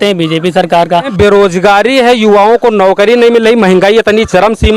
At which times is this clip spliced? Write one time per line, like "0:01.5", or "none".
0:01.1